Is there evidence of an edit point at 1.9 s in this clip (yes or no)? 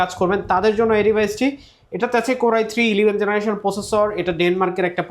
no